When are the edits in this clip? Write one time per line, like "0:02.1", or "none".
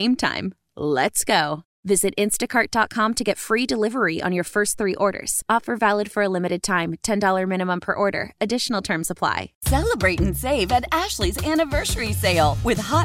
0:09.5